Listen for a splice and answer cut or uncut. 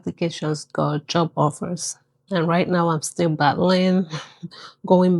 uncut